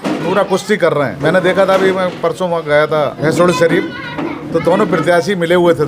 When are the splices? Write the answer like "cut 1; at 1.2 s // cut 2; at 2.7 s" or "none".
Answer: cut 1; at 1.1 s // cut 2; at 3.2 s // cut 3; at 4.4 s